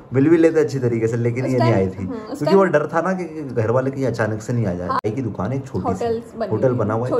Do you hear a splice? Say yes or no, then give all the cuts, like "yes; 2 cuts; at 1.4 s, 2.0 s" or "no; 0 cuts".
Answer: yes; 1 cut; at 5.0 s